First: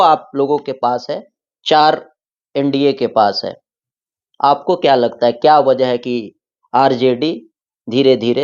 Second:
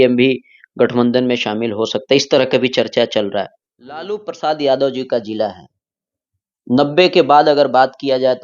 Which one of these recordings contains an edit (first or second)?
second